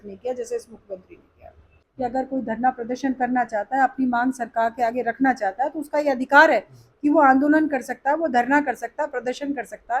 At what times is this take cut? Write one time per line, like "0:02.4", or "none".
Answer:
0:01.8